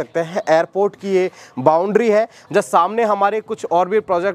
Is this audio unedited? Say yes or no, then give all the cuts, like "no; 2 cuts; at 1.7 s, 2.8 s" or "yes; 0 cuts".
no; 1 cut; at 2.4 s